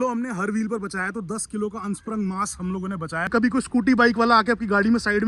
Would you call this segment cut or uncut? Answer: cut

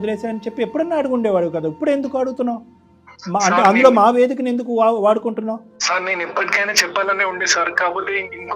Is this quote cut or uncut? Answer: cut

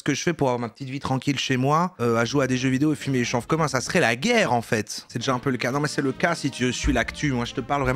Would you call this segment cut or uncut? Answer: cut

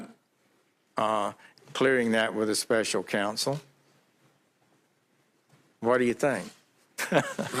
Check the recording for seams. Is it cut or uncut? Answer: cut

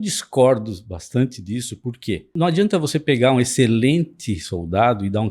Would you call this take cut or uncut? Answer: cut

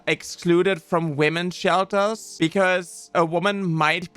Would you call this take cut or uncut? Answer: cut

